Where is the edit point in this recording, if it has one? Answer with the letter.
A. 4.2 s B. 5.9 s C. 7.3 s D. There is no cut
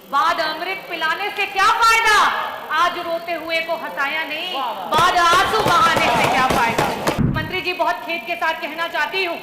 C